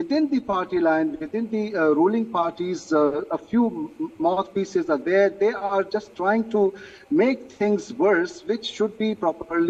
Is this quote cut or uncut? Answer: uncut